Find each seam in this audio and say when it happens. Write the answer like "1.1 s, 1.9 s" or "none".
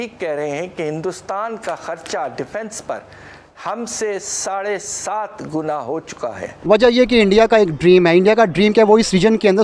6.5 s